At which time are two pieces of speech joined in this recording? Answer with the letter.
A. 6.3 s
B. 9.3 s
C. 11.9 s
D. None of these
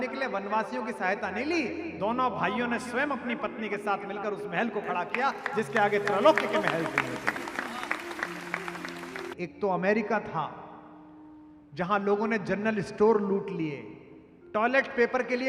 B